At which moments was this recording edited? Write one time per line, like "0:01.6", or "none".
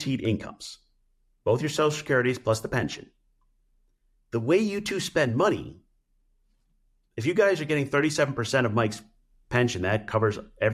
none